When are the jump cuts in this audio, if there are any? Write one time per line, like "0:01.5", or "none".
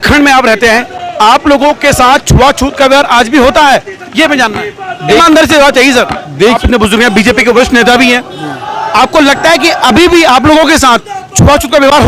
0:06.6